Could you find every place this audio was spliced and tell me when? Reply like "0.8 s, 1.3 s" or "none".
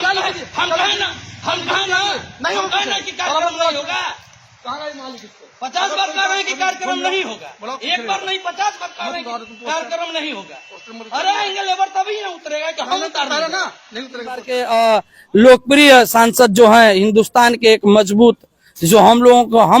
14.6 s